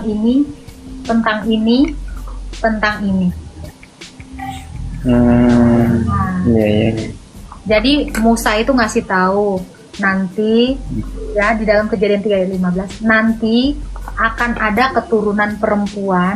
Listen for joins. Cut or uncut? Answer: uncut